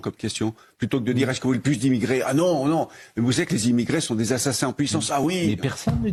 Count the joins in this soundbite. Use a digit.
0